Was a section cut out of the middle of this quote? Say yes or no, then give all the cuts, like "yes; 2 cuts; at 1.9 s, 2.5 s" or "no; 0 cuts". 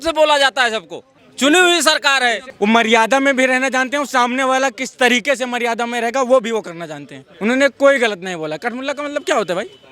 yes; 2 cuts; at 2.5 s, 7.2 s